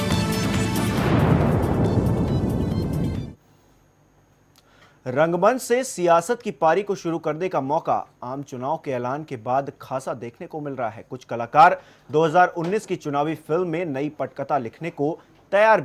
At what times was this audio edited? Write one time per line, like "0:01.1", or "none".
none